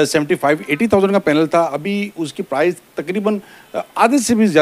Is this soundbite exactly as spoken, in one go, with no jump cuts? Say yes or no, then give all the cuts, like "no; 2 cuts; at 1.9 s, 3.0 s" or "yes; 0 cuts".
yes; 0 cuts